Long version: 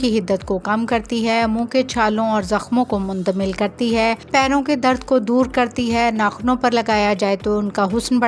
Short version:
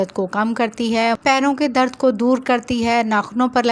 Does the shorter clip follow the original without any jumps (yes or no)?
no